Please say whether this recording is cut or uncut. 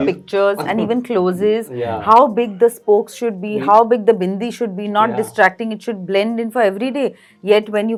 uncut